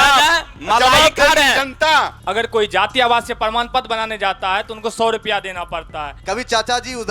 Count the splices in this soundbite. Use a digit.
2